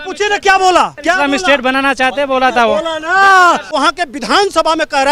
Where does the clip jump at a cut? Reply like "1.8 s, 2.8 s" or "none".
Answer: 0.9 s, 3.7 s